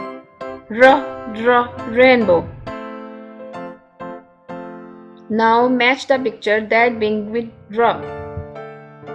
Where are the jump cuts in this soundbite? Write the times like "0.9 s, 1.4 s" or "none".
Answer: 2.6 s, 5.2 s, 8.0 s